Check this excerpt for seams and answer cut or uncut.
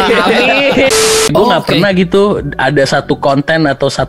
cut